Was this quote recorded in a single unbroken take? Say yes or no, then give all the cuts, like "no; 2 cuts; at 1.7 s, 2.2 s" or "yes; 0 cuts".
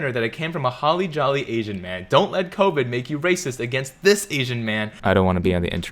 no; 1 cut; at 4.9 s